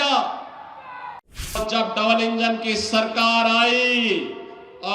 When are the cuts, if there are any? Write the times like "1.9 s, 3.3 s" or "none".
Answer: 1.6 s

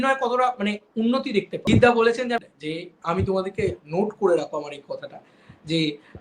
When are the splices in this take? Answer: 1.5 s, 2.4 s

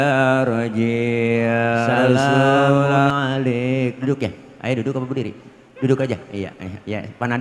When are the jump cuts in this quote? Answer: 3.1 s

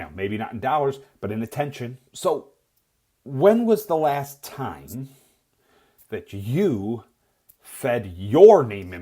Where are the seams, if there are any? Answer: 2.0 s

